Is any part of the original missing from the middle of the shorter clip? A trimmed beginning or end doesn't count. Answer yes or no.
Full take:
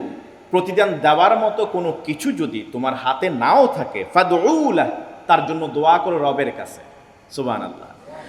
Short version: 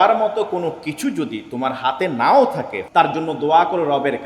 yes